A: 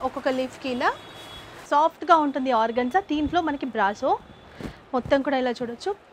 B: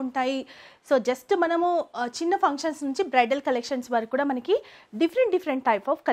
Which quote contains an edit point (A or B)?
A